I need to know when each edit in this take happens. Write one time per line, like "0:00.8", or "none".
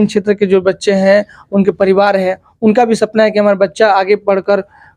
none